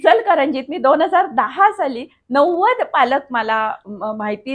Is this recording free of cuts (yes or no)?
yes